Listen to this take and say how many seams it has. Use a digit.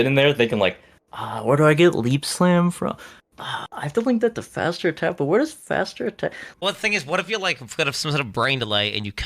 1